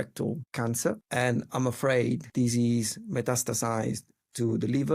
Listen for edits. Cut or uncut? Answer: cut